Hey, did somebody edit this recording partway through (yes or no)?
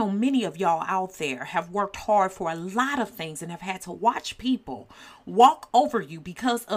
no